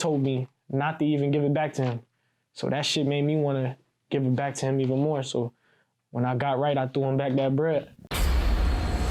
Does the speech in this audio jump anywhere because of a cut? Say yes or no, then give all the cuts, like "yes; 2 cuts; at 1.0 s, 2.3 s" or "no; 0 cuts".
yes; 1 cut; at 8.0 s